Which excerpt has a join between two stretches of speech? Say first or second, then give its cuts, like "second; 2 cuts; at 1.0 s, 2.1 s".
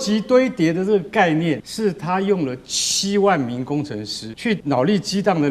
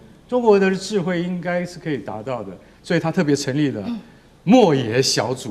first; 2 cuts; at 1.7 s, 4.5 s